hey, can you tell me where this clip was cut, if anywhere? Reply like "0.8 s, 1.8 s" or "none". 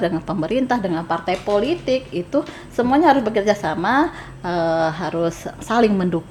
none

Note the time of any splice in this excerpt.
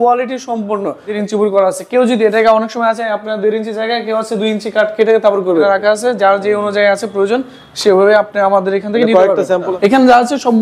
1.2 s, 5.6 s, 9.7 s

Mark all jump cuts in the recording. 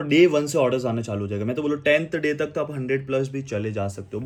none

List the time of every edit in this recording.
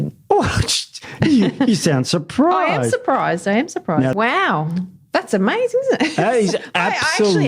4.1 s

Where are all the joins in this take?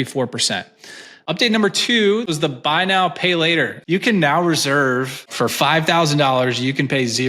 1.1 s, 2.2 s, 3.8 s, 5.3 s

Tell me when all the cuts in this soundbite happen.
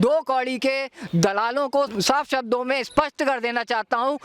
1.9 s

